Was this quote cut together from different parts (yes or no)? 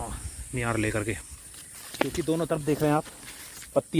yes